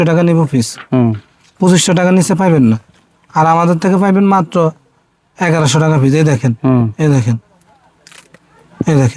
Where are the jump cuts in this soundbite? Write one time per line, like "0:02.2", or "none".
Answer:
none